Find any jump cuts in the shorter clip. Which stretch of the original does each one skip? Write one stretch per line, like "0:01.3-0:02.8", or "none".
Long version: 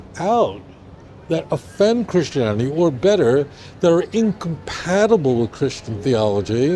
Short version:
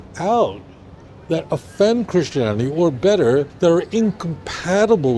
0:03.5-0:03.7